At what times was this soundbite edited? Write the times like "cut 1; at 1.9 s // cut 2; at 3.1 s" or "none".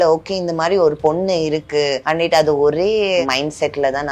cut 1; at 2.0 s // cut 2; at 3.2 s